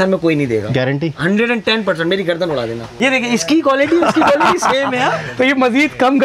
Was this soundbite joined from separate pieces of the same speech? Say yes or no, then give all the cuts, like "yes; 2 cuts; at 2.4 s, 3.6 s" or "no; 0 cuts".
yes; 1 cut; at 3.0 s